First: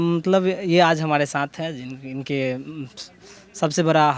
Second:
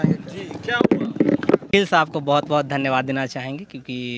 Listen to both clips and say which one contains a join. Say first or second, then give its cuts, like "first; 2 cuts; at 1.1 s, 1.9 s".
second; 1 cut; at 1.7 s